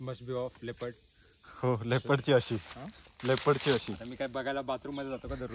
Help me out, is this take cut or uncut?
uncut